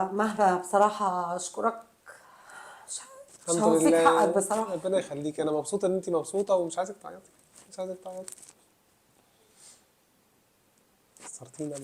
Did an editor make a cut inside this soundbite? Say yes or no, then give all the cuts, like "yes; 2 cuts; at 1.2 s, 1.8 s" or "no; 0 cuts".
no; 0 cuts